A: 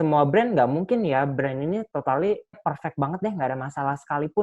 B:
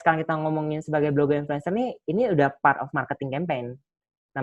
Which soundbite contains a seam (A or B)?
A